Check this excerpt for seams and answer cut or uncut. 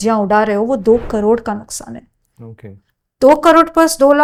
uncut